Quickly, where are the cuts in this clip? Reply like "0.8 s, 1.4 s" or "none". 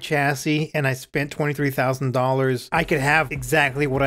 3.0 s